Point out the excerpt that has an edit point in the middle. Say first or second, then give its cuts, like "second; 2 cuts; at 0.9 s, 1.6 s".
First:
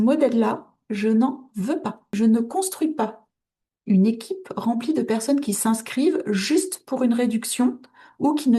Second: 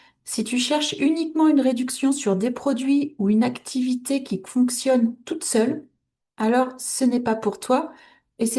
first; 1 cut; at 2.1 s